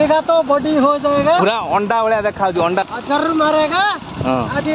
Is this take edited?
yes; 1 cut; at 2.9 s

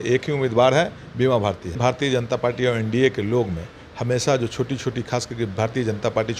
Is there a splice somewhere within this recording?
yes; 1 cut; at 1.7 s

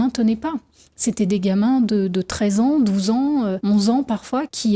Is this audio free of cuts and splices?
yes; 0 cuts

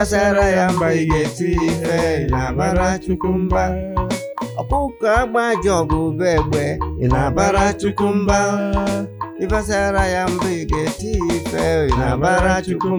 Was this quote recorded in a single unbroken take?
yes; 0 cuts

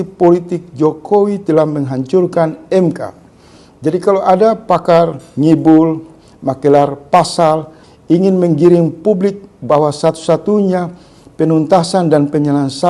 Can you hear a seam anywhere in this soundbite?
no; 0 cuts

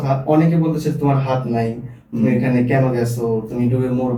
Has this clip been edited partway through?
no; 0 cuts

